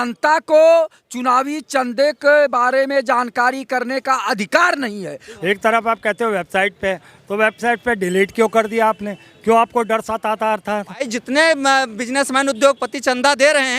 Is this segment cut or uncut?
cut